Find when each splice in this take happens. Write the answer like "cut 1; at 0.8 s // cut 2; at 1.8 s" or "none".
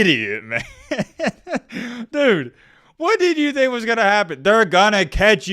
none